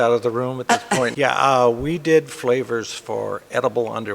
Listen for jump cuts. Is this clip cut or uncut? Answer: cut